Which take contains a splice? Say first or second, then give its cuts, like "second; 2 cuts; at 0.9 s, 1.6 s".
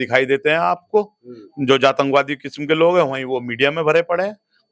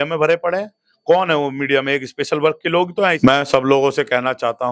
second; 1 cut; at 3.2 s